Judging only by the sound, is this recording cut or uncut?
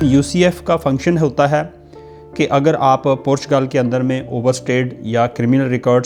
uncut